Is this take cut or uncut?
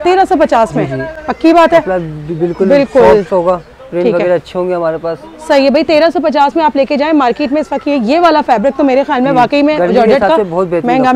uncut